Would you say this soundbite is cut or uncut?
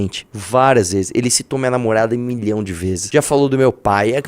cut